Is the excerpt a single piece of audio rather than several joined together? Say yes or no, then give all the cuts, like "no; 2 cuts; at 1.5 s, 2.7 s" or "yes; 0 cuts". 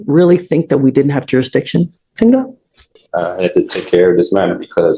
yes; 0 cuts